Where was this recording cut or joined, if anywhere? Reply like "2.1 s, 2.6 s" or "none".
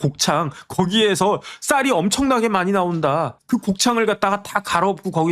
3.4 s